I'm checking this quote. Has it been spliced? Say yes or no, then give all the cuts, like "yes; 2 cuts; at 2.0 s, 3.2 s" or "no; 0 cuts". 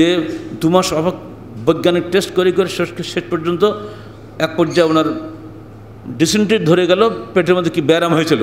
no; 0 cuts